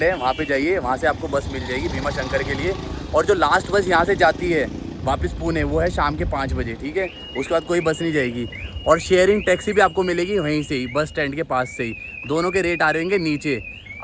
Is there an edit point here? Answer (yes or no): no